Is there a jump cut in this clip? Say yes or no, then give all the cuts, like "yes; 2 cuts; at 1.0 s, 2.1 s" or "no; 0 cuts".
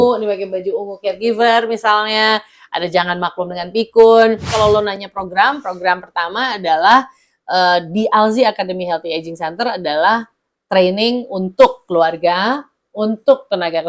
yes; 1 cut; at 4.5 s